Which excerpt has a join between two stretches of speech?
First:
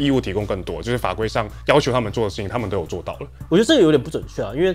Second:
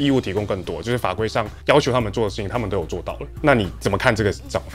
first; 1 cut; at 3.2 s

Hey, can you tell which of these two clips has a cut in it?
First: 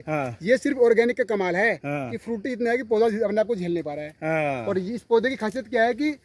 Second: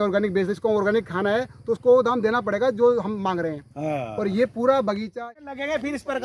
second; 1 cut; at 5.1 s

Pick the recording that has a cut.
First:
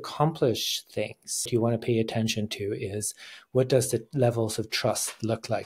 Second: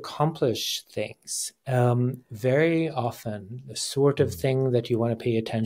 first; 1 cut; at 1.5 s

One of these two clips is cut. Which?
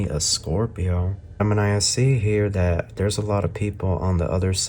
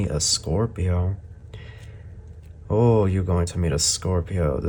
first; 1 cut; at 1.4 s

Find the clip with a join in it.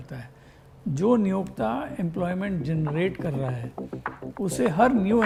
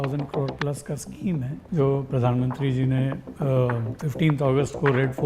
second; 1 cut; at 1.6 s

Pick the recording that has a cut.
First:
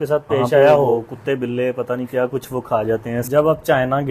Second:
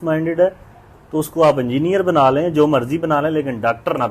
first; 2 cuts; at 1.1 s, 3.3 s

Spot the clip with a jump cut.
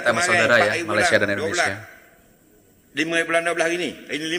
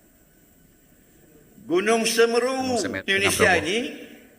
second; 1 cut; at 2.8 s

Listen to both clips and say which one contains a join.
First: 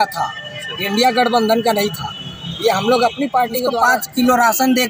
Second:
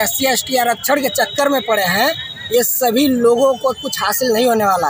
first; 1 cut; at 3.7 s

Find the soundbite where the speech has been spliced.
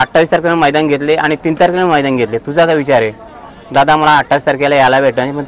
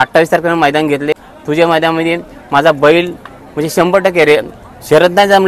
second; 1 cut; at 1.1 s

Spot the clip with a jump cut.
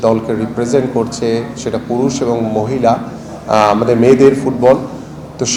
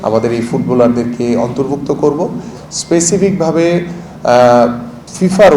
second; 1 cut; at 2.5 s

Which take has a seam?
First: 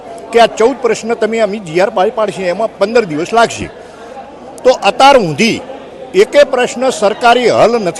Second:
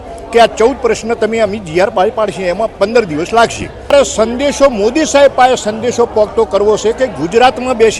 second; 1 cut; at 3.9 s

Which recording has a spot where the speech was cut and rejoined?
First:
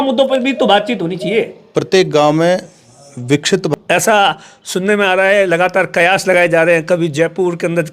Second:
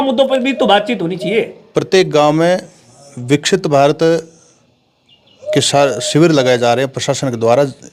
first; 1 cut; at 3.7 s

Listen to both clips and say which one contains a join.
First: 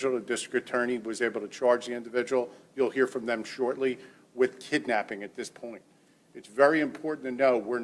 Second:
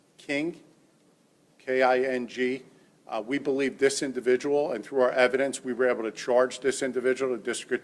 second; 1 cut; at 1.6 s

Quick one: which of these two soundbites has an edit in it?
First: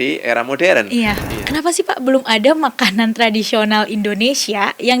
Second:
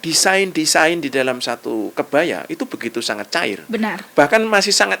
first; 1 cut; at 1.2 s

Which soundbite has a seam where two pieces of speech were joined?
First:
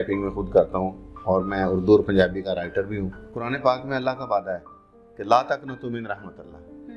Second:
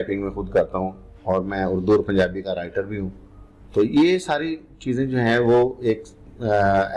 first; 1 cut; at 3.5 s

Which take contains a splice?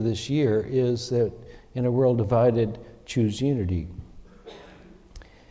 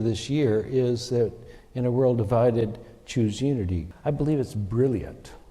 second; 1 cut; at 3.9 s

